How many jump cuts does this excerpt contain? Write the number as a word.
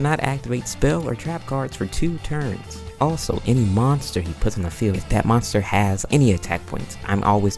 two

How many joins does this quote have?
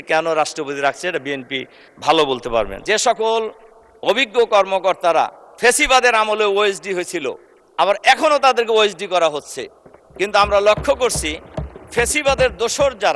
one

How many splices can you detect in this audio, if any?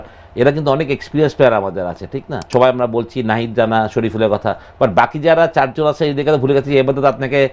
one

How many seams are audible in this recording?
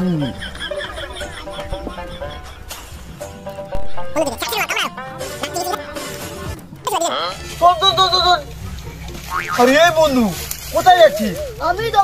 one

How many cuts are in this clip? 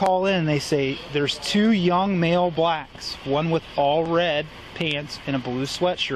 zero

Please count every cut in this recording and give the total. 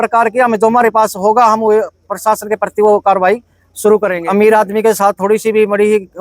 one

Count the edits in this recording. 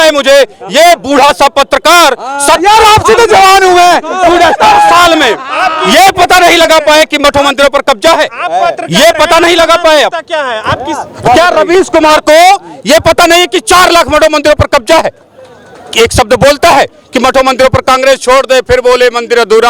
zero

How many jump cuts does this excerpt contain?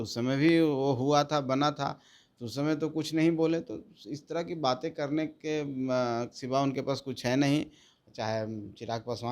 one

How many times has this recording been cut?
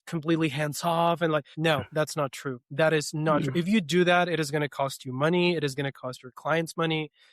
one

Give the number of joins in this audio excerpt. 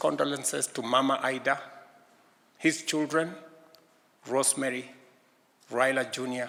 zero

